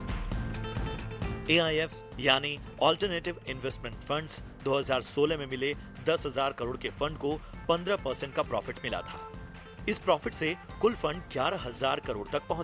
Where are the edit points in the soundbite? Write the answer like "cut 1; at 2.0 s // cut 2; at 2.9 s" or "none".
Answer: none